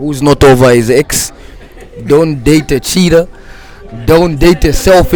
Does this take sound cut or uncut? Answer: uncut